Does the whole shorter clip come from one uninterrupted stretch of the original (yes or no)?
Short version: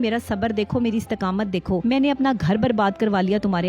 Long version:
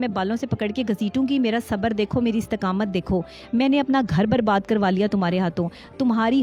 no